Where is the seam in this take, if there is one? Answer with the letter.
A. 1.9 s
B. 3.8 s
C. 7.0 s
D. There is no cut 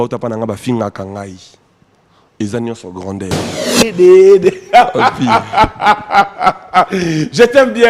B